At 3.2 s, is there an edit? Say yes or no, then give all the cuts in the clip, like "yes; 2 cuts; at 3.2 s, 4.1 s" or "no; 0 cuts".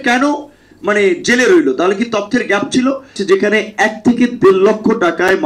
yes; 1 cut; at 3.2 s